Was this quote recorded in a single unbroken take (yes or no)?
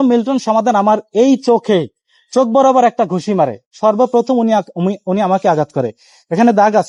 yes